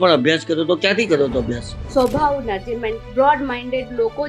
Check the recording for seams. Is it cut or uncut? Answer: cut